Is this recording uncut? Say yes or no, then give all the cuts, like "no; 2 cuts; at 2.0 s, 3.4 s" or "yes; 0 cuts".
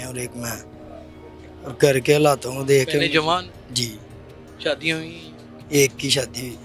yes; 0 cuts